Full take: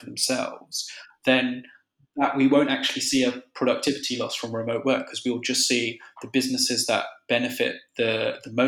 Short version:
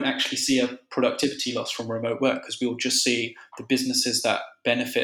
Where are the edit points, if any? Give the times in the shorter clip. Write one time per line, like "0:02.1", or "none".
none